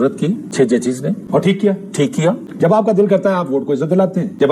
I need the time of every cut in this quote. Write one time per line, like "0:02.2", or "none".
0:02.4